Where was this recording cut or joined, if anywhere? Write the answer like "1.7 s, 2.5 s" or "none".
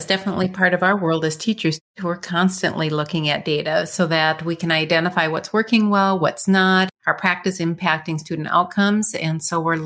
1.9 s